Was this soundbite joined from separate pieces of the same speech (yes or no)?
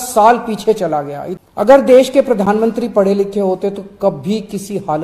yes